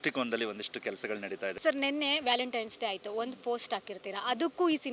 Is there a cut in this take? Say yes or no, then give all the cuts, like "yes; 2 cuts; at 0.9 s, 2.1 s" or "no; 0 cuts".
yes; 1 cut; at 1.6 s